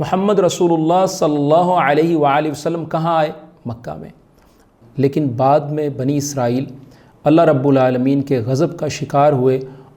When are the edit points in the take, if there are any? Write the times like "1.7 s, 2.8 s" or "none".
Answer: 4.7 s